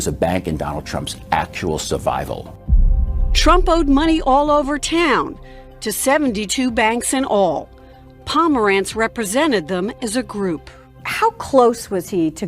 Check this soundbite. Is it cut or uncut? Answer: cut